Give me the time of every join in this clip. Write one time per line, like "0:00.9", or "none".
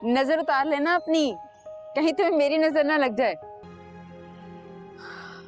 0:03.7